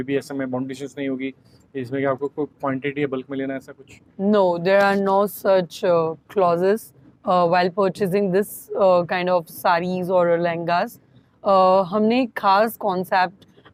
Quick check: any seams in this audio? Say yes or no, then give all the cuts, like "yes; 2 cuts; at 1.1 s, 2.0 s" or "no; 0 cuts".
no; 0 cuts